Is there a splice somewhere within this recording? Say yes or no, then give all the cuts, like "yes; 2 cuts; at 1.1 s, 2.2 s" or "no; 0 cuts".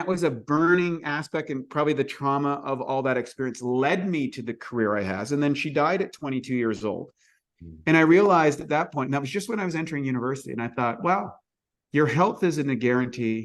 no; 0 cuts